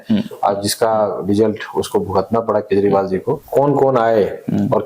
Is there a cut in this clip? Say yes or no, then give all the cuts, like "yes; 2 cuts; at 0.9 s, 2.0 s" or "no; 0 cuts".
yes; 1 cut; at 3.4 s